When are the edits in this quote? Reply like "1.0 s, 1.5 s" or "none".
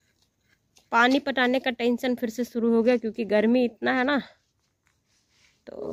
none